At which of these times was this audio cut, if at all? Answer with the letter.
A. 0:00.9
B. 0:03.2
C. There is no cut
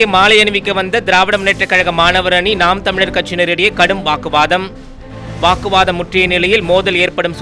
C